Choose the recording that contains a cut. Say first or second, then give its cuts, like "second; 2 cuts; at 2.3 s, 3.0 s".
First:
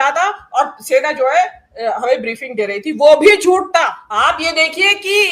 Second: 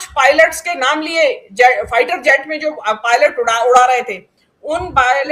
first; 1 cut; at 4.1 s